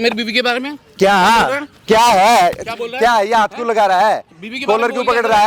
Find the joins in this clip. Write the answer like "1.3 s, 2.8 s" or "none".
none